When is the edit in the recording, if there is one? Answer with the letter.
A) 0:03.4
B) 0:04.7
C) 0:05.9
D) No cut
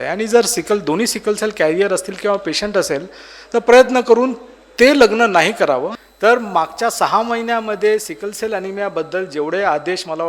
C